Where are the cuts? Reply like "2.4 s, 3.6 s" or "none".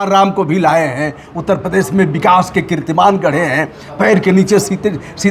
none